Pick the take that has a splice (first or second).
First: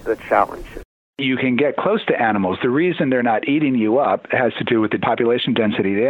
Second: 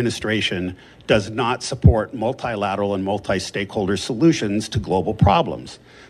first